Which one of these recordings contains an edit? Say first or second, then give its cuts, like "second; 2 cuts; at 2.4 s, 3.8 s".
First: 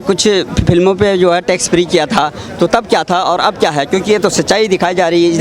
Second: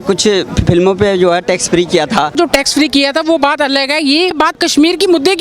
second; 2 cuts; at 2.3 s, 4.4 s